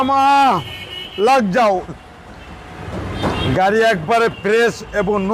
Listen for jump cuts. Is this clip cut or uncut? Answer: cut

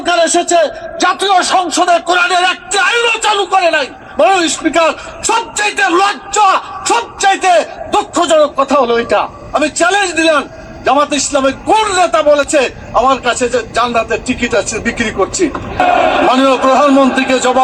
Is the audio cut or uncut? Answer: cut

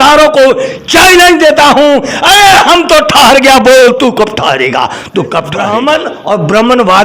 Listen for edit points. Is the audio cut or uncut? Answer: cut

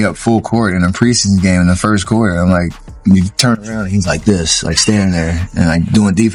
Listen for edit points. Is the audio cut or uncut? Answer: uncut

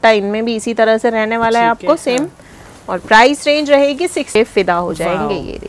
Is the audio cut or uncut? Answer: cut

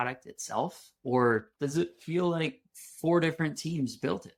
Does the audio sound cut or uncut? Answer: uncut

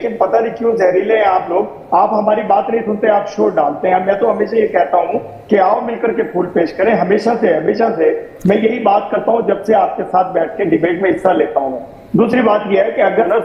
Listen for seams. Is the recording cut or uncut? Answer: uncut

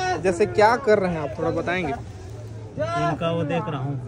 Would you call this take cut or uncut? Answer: uncut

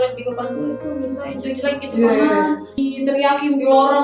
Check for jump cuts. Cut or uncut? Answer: cut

